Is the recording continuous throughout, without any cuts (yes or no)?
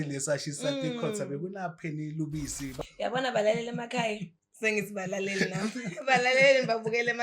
no